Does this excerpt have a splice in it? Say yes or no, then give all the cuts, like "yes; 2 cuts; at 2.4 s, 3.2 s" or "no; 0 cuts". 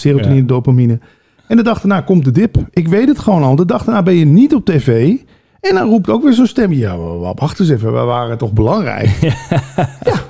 no; 0 cuts